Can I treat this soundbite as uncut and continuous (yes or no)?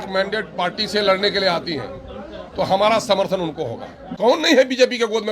no